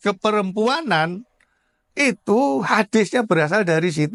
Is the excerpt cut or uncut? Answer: uncut